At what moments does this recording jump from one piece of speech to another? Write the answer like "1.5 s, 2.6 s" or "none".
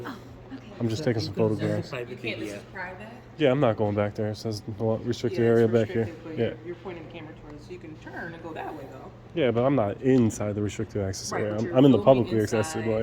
none